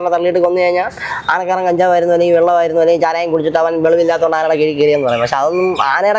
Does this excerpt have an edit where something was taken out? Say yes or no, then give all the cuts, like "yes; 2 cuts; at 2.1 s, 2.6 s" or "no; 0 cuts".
no; 0 cuts